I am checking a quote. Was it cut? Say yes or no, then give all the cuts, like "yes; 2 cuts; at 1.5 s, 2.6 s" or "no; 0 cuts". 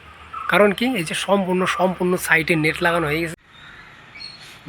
yes; 1 cut; at 3.3 s